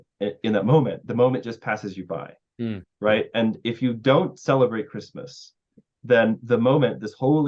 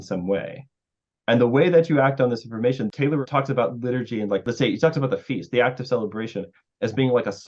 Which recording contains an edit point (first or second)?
second